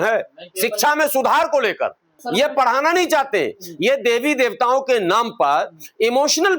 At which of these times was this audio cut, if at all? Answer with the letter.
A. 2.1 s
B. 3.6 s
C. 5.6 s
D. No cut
A